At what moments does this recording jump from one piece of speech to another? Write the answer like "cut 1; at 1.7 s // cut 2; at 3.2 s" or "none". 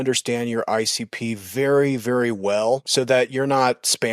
cut 1; at 2.9 s